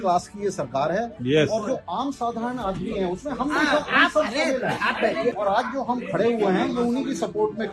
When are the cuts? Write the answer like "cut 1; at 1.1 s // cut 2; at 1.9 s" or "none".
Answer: cut 1; at 5.4 s